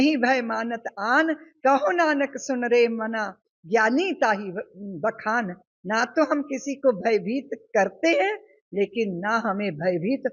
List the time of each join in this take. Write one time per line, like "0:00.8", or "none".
none